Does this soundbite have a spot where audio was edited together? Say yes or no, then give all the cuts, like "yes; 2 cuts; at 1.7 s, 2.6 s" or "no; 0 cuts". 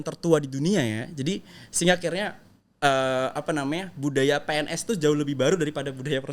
no; 0 cuts